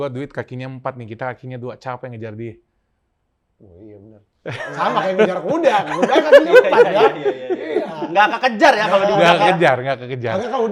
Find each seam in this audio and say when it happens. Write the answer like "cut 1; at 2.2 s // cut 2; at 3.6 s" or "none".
none

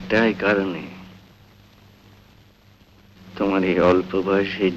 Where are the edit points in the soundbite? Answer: none

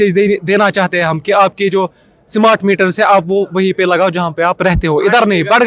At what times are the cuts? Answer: none

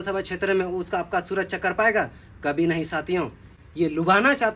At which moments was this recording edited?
cut 1; at 3.5 s

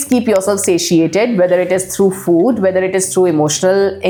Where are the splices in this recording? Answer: none

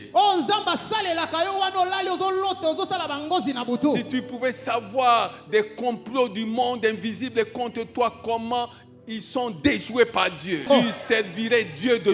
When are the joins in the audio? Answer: cut 1; at 10.6 s

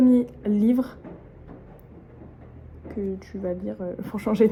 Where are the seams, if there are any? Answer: none

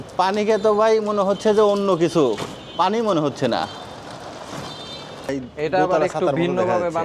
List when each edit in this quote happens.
cut 1; at 5.3 s

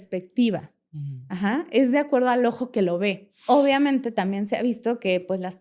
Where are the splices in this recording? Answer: cut 1; at 3.4 s

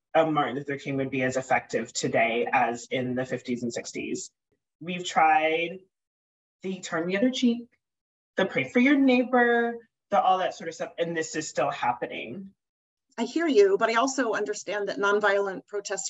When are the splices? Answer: cut 1; at 4.5 s // cut 2; at 12.8 s

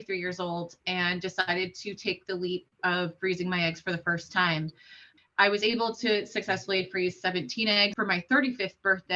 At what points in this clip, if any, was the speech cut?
cut 1; at 5.1 s // cut 2; at 7.9 s

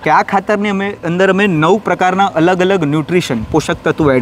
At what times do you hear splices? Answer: none

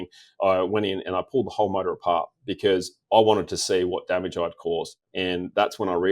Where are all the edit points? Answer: cut 1; at 4.9 s

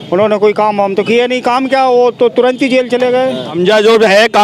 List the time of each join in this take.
cut 1; at 3.5 s

